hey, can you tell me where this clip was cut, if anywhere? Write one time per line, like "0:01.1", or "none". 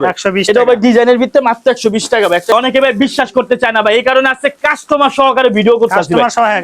0:02.5